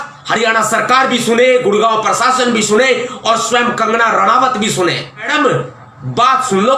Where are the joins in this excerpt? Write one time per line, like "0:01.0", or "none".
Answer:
0:05.3